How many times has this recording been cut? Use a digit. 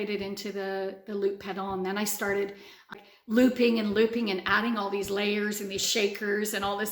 1